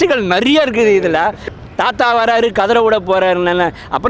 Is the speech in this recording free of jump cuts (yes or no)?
no